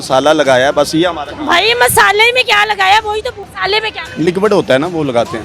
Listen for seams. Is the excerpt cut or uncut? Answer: cut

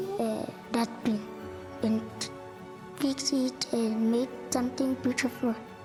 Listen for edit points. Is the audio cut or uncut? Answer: uncut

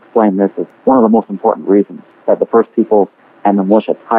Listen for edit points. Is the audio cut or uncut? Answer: cut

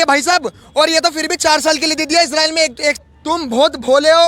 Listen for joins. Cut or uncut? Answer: cut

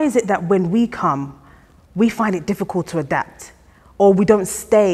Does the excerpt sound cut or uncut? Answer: uncut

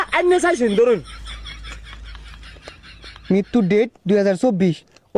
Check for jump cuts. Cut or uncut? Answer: uncut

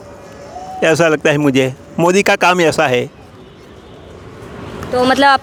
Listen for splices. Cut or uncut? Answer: uncut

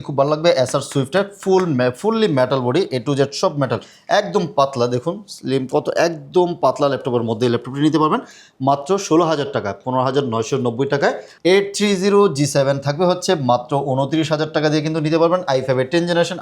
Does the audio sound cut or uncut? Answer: cut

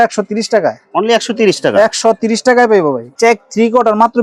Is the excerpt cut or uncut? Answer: uncut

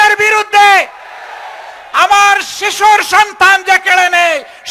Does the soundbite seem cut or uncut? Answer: uncut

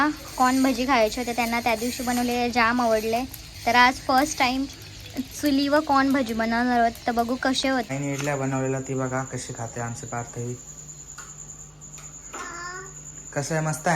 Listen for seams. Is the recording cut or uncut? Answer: cut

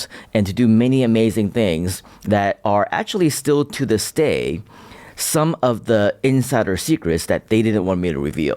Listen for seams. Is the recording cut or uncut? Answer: uncut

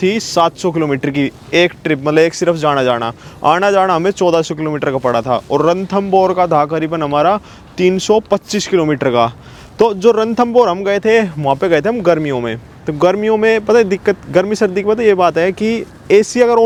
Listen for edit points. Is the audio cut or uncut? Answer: uncut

